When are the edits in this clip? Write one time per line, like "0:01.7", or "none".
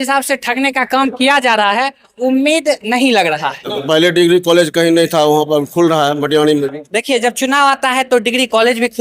0:03.6